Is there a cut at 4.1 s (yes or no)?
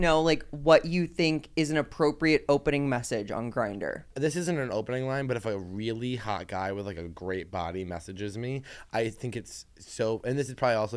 yes